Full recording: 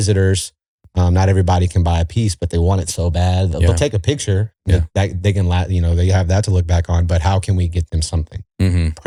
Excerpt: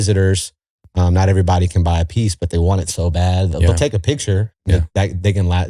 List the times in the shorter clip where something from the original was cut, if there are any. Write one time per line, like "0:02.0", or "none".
none